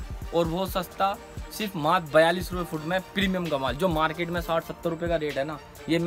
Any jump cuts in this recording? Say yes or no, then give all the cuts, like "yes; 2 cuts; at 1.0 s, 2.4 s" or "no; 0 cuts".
no; 0 cuts